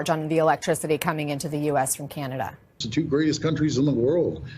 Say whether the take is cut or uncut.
cut